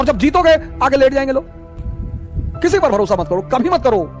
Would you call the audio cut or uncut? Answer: cut